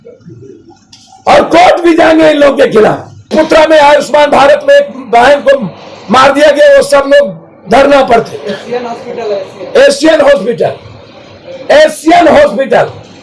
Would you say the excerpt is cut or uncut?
cut